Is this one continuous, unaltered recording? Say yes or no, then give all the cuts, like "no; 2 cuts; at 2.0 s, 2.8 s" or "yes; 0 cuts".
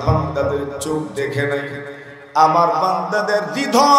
yes; 0 cuts